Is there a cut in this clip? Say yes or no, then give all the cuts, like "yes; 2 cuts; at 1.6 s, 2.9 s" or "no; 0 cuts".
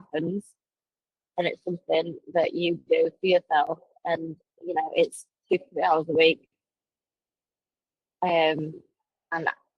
no; 0 cuts